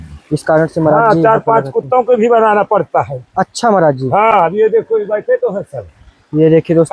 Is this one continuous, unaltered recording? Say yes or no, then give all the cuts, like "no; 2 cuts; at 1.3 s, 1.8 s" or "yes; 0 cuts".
yes; 0 cuts